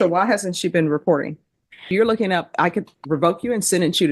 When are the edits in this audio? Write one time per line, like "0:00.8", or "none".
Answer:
0:01.9